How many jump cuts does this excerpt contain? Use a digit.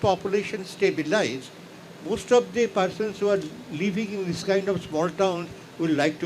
0